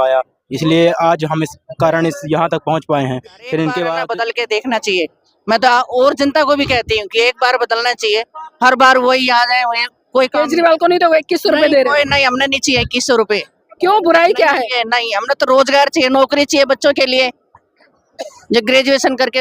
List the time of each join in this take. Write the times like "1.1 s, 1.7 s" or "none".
4.0 s